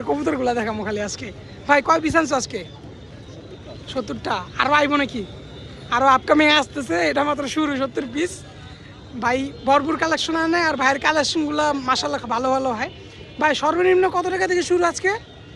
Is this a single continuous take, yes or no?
yes